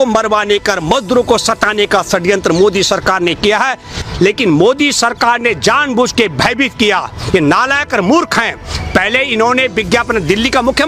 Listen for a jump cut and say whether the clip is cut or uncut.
cut